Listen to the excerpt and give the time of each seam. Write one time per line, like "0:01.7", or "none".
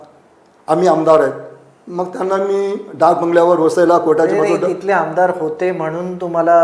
none